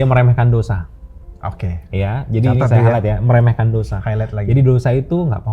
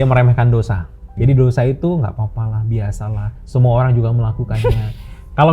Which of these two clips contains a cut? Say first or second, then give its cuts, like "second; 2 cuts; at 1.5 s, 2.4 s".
second; 1 cut; at 1.1 s